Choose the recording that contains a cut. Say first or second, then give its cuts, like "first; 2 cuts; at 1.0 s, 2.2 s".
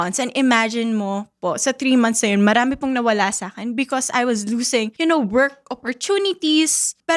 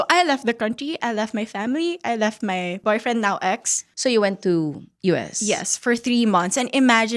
second; 2 cuts; at 2.8 s, 3.8 s